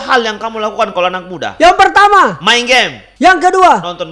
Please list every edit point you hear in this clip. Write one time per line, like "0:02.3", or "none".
0:03.0

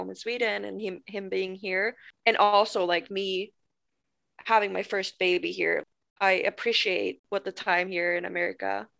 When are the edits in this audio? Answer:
0:02.1
0:05.8
0:07.1

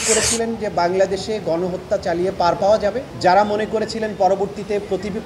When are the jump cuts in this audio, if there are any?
0:03.1

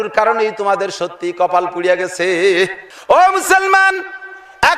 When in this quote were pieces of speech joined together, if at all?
0:02.9

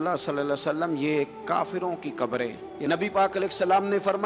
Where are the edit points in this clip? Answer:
0:02.7

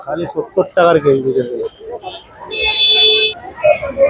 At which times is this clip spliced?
0:03.1

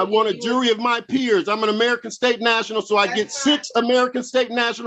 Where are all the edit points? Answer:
none

